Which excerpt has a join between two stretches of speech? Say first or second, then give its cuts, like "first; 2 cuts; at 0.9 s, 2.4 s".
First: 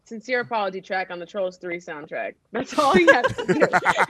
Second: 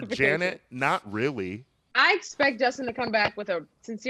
second; 1 cut; at 2.0 s